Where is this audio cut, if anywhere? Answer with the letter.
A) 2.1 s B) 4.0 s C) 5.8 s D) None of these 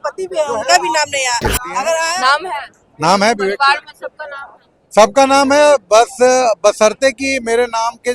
A